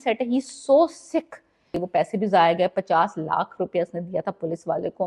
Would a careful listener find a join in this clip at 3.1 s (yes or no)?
no